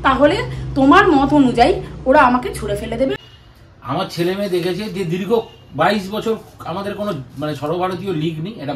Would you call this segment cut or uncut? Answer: cut